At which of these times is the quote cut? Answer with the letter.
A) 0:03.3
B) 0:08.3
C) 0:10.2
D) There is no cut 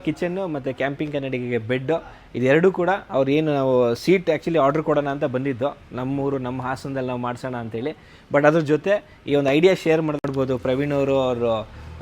C